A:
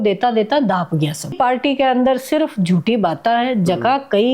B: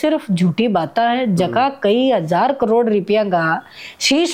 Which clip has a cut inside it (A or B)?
A